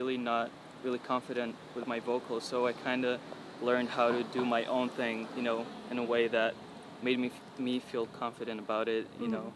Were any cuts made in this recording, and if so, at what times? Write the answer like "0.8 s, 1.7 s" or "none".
none